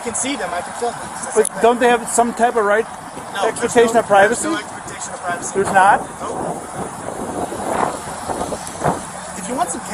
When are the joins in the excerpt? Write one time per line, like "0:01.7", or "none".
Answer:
none